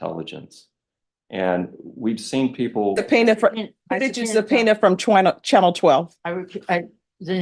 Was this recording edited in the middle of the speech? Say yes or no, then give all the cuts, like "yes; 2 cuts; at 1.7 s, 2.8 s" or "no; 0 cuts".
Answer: yes; 1 cut; at 3.0 s